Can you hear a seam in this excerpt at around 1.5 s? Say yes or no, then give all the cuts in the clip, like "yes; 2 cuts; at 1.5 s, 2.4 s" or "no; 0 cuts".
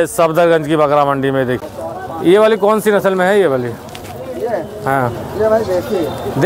yes; 1 cut; at 1.5 s